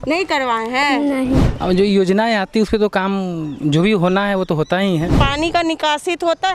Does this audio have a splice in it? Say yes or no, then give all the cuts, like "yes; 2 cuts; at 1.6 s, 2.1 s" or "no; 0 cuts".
yes; 2 cuts; at 1.5 s, 5.1 s